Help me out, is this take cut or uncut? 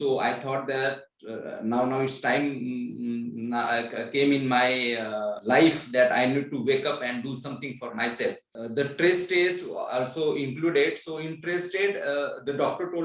cut